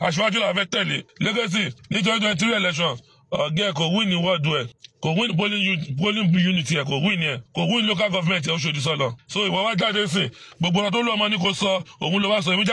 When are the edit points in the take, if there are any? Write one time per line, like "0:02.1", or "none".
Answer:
0:01.0
0:01.8
0:04.8
0:07.4
0:09.2